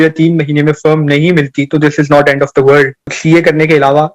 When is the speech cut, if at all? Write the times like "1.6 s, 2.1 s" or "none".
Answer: 3.2 s